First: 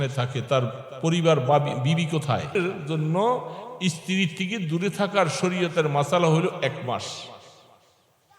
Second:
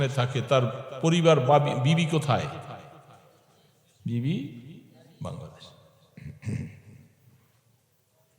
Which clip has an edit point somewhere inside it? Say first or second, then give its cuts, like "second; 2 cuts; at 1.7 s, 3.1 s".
first; 1 cut; at 2.6 s